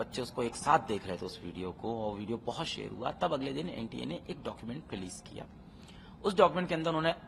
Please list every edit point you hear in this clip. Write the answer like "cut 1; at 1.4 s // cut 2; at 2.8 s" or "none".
none